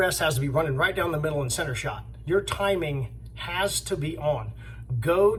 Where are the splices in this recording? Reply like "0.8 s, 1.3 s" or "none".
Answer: none